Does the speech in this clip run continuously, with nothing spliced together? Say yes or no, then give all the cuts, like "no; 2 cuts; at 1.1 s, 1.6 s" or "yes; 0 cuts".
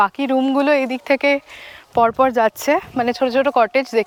yes; 0 cuts